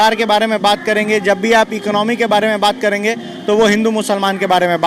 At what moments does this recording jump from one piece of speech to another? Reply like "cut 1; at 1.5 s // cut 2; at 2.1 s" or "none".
none